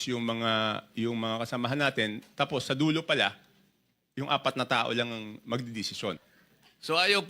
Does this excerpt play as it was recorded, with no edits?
no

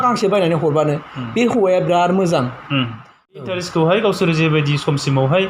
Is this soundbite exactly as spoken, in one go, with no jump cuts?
no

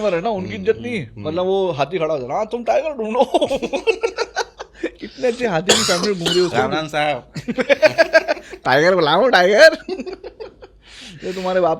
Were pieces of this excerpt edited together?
no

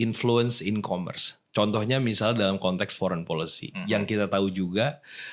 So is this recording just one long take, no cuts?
yes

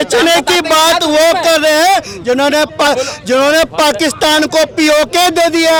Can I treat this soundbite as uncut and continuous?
yes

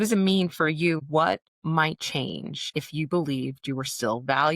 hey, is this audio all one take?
no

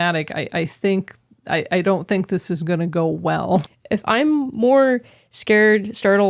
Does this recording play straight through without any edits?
no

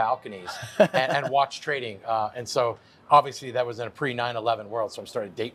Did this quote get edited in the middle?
no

